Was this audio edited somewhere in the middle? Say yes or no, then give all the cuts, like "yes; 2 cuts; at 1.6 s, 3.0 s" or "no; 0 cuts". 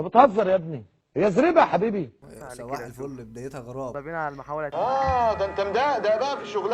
yes; 2 cuts; at 2.2 s, 4.0 s